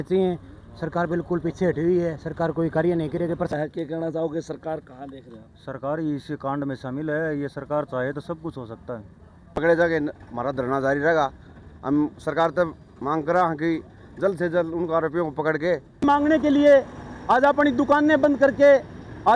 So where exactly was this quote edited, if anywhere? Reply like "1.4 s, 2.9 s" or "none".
3.5 s, 9.5 s, 16.0 s